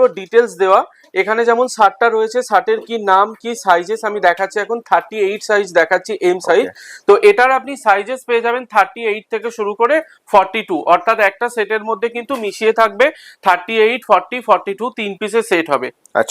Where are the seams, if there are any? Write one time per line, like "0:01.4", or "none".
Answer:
none